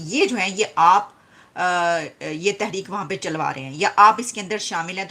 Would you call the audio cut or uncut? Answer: uncut